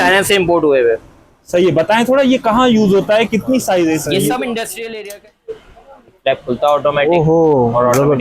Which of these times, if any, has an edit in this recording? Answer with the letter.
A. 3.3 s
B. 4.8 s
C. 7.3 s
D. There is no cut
B